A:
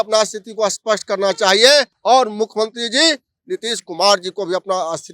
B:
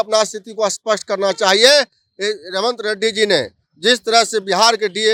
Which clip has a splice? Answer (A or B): A